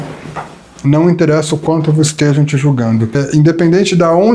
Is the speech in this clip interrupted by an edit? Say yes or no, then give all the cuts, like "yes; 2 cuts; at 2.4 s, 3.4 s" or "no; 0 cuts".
yes; 1 cut; at 3.2 s